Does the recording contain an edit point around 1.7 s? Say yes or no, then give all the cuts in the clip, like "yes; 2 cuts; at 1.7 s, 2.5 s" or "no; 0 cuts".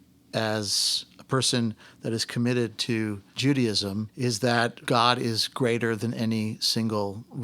no; 3 cuts; at 3.3 s, 4.1 s, 4.8 s